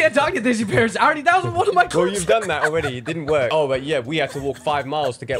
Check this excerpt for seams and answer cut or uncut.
cut